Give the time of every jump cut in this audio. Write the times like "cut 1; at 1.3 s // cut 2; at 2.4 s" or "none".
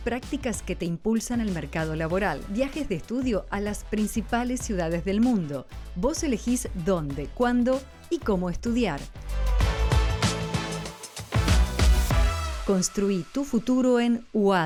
none